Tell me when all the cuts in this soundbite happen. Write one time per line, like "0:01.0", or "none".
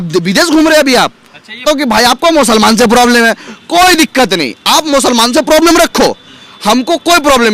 0:01.6